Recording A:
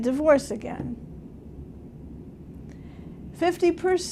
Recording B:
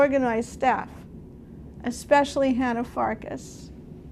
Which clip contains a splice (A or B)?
B